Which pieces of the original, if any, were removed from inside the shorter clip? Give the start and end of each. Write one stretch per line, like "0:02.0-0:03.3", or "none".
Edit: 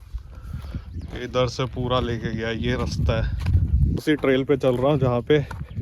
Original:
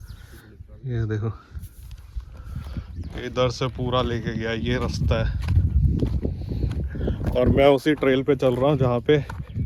0:06.0-0:07.8